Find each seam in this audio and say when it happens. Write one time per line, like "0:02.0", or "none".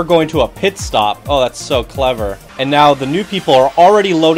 0:02.4